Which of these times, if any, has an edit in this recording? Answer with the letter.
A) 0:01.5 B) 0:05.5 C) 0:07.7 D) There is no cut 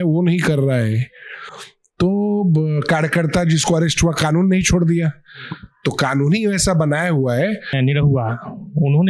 C